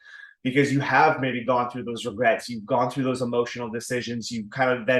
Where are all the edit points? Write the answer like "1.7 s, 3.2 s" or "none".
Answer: none